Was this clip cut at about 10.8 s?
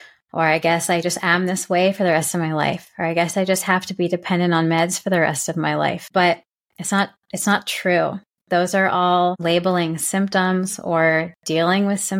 no; 2 cuts; at 6.0 s, 9.4 s

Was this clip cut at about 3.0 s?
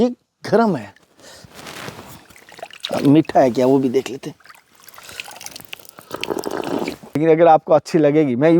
no; 1 cut; at 7.2 s

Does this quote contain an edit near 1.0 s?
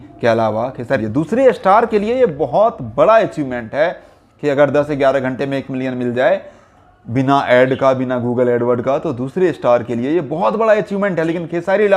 yes; 1 cut; at 1.0 s

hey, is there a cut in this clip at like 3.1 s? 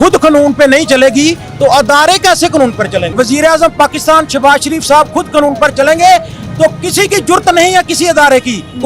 yes; 1 cut; at 3.1 s

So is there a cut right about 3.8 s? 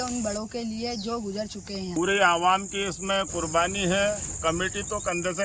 no; 1 cut; at 1.9 s

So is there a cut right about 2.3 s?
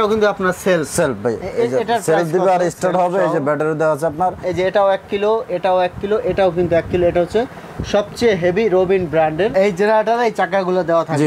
no; 2 cuts; at 4.4 s, 9.5 s

